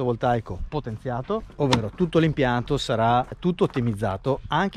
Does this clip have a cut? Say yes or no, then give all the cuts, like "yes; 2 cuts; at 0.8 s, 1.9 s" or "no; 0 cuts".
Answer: yes; 1 cut; at 1.5 s